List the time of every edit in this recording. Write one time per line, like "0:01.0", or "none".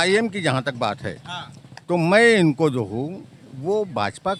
none